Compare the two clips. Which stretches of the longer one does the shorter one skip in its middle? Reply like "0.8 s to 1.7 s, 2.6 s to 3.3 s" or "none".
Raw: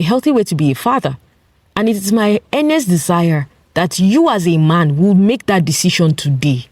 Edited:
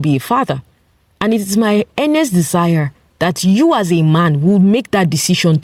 none